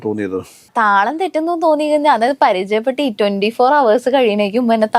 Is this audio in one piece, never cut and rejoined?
yes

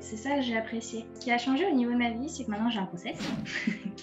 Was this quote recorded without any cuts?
no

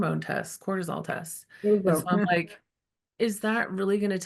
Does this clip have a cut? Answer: no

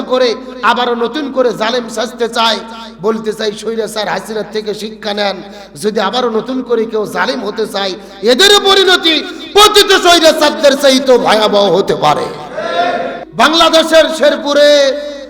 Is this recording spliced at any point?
yes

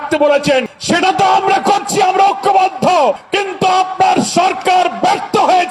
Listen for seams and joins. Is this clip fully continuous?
yes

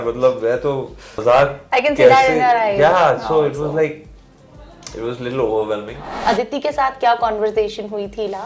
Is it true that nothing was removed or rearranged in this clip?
no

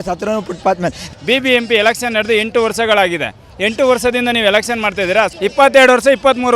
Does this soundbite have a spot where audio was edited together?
yes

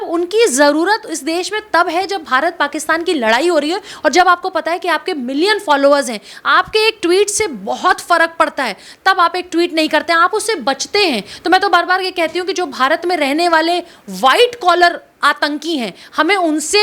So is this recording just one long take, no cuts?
yes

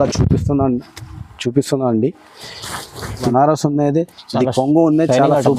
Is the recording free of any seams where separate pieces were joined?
no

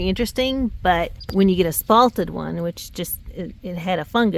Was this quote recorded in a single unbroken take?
no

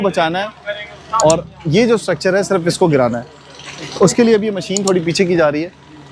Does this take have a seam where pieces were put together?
no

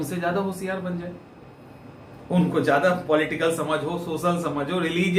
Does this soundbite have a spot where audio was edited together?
no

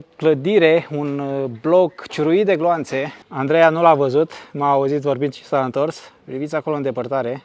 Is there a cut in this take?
no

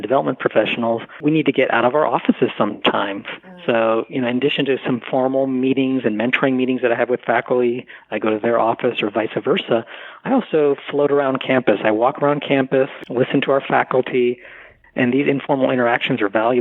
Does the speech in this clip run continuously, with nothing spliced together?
no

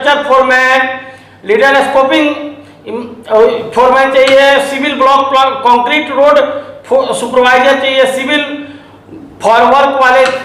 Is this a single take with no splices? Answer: yes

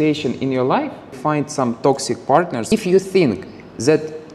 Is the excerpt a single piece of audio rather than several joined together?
no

